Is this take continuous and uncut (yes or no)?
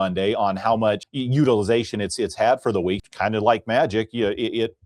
no